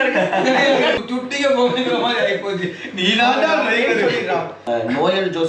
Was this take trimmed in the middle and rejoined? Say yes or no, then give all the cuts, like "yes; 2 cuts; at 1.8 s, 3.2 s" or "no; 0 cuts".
yes; 2 cuts; at 1.0 s, 4.5 s